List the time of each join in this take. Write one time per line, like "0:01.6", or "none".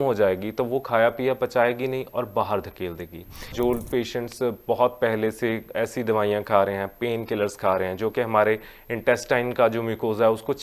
0:03.5